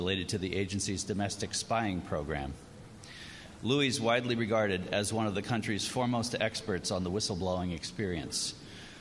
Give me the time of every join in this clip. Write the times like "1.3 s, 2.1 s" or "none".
2.0 s